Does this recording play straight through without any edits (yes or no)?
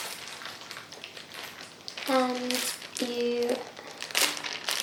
yes